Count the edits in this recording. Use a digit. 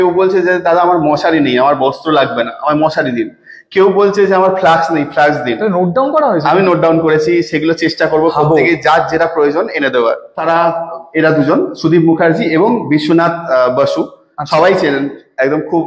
1